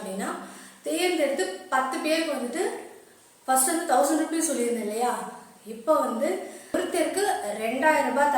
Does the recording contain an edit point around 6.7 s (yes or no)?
yes